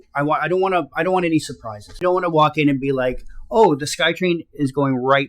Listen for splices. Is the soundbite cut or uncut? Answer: cut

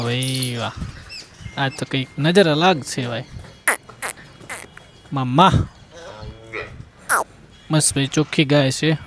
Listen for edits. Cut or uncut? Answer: uncut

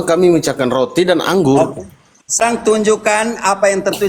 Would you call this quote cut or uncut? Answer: cut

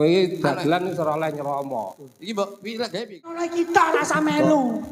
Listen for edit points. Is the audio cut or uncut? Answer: cut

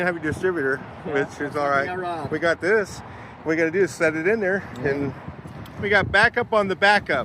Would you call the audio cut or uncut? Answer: cut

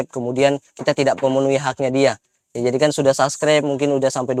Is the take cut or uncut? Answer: uncut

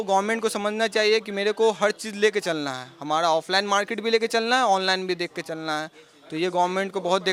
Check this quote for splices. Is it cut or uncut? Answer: uncut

